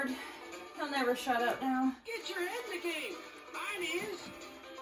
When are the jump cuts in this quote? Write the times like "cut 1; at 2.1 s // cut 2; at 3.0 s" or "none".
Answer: none